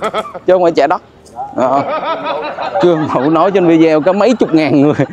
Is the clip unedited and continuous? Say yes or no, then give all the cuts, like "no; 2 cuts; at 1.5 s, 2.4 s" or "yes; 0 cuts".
yes; 0 cuts